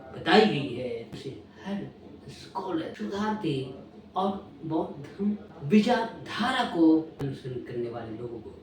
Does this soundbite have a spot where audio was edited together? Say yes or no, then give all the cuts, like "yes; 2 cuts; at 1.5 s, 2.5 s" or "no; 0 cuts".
yes; 3 cuts; at 1.2 s, 2.9 s, 7.2 s